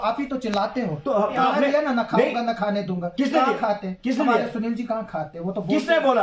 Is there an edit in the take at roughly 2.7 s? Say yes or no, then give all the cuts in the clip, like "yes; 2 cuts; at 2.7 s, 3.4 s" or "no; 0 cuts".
no; 1 cut; at 1.3 s